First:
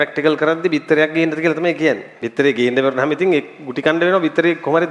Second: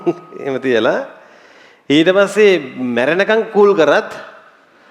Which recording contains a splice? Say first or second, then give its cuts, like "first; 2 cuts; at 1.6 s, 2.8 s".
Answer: first; 1 cut; at 2.1 s